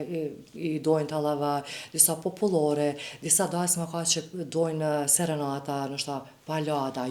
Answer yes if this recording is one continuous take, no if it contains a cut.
yes